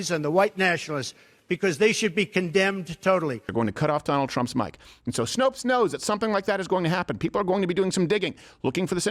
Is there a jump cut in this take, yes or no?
yes